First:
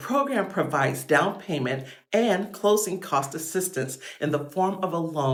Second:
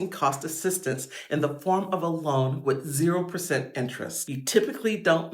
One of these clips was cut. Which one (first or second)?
second